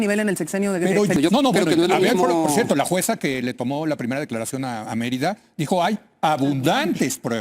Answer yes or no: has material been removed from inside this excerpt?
yes